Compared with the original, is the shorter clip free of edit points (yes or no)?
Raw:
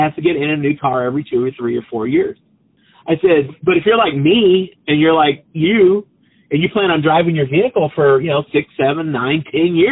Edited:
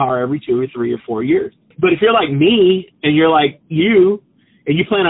no